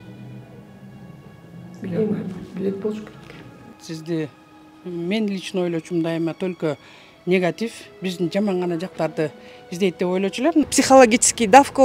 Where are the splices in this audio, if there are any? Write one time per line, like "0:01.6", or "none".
0:03.8
0:10.7